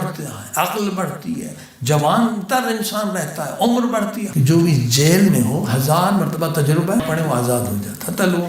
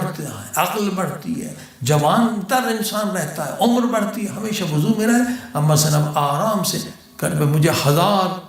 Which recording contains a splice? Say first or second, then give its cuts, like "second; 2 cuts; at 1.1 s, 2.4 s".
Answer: first; 2 cuts; at 4.3 s, 7.0 s